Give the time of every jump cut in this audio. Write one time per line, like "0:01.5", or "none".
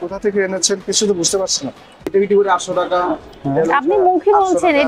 0:02.0